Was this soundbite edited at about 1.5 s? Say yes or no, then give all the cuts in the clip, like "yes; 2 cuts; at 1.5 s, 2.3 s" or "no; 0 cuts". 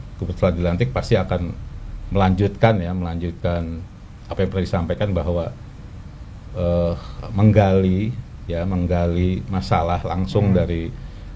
no; 0 cuts